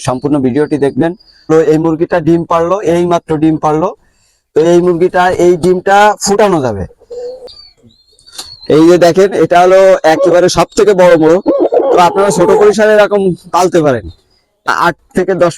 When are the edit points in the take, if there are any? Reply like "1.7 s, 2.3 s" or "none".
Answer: 1.5 s, 7.5 s, 14.7 s